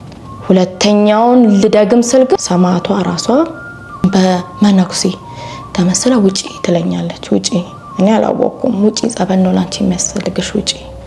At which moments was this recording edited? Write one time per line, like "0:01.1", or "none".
0:02.4
0:04.0

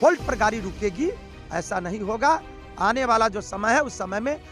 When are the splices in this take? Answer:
none

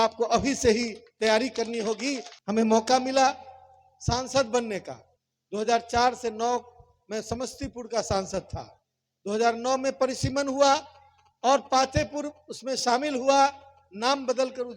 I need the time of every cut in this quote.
0:02.3

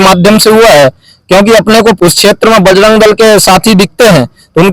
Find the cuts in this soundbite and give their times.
0:02.0

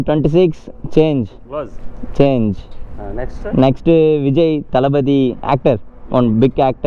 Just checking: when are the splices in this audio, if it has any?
none

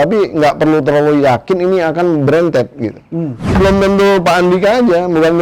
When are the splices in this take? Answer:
0:03.6

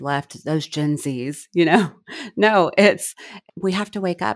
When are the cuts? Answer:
0:03.3

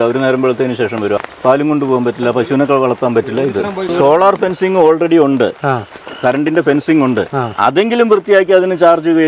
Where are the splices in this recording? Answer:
0:01.2
0:03.9

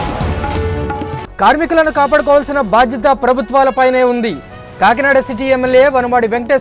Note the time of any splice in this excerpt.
0:01.1

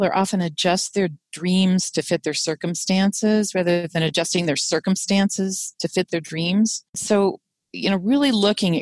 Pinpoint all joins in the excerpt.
0:07.0

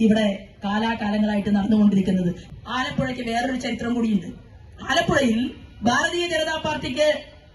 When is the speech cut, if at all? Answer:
0:02.4

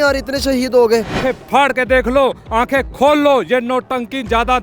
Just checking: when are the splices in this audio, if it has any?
0:01.1

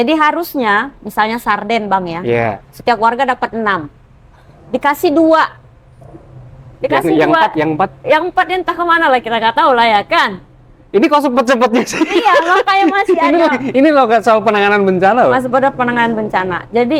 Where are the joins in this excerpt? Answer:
none

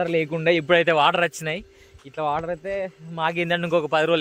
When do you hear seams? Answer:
none

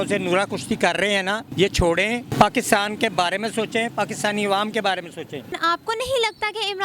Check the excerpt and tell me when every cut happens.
0:01.4
0:02.3
0:05.6

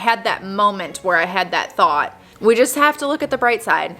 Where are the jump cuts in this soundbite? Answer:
0:02.2

